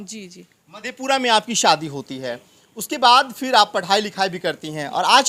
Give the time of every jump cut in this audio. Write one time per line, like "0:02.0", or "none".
none